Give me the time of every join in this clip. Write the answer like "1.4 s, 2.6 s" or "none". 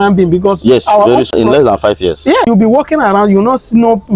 1.3 s, 2.5 s

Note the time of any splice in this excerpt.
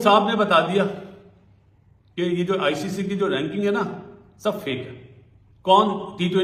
none

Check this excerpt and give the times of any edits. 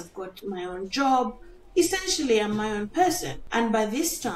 3.3 s

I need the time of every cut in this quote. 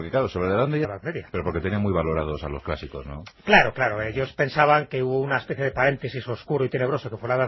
none

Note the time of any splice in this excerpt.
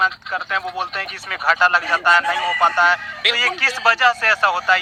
none

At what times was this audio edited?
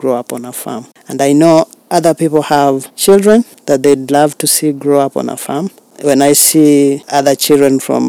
0.9 s, 2.9 s, 3.6 s, 5.8 s, 7.0 s

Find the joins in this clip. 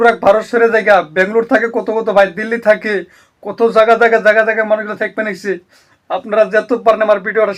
none

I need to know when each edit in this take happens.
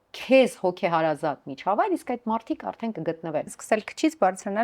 3.6 s

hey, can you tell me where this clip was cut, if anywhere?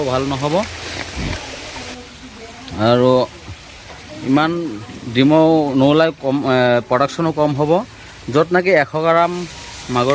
none

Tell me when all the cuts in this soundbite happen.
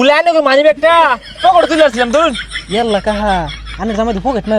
2.5 s

